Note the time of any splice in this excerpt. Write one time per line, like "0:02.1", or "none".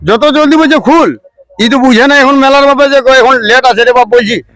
none